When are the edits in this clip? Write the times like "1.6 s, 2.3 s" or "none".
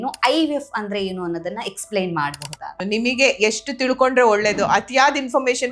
2.7 s